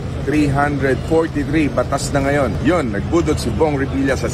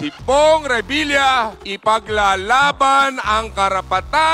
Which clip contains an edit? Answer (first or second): first